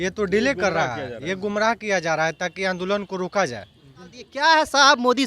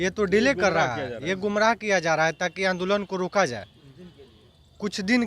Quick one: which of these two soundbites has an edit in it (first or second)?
first